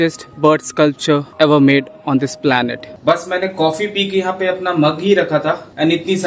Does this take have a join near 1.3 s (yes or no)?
no